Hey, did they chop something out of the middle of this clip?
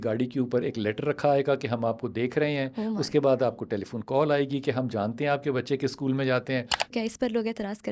yes; 1 cut; at 6.9 s

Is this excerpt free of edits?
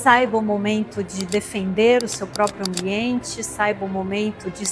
yes; 0 cuts

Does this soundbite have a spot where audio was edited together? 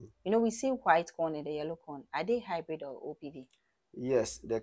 no; 0 cuts

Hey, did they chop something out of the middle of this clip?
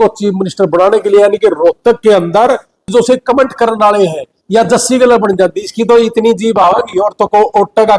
yes; 1 cut; at 2.9 s

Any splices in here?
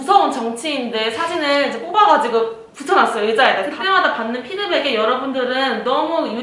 yes; 1 cut; at 3.7 s

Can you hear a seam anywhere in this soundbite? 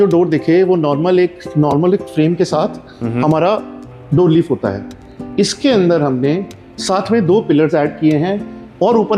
no; 0 cuts

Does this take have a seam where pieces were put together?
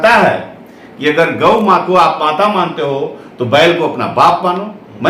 no; 0 cuts

